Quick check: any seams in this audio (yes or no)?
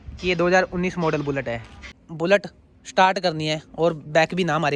yes